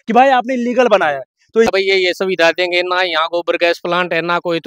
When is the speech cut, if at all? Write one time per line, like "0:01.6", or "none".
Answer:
0:01.7